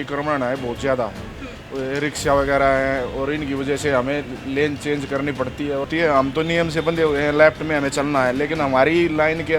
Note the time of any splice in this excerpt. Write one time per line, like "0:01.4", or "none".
0:05.9